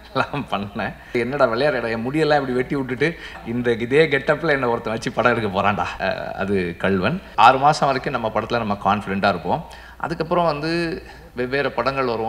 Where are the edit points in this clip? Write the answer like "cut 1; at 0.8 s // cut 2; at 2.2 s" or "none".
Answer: cut 1; at 1.1 s // cut 2; at 3.4 s // cut 3; at 5.9 s // cut 4; at 7.2 s